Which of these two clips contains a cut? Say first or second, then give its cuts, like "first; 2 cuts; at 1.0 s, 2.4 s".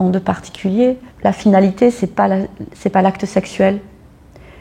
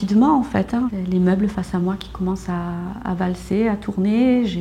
second; 1 cut; at 0.9 s